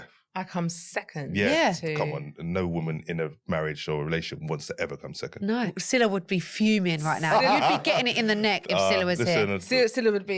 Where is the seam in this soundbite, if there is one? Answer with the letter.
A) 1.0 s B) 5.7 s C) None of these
B